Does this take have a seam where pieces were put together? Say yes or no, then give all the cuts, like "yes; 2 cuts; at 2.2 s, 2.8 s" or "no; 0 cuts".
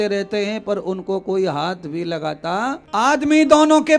yes; 1 cut; at 2.8 s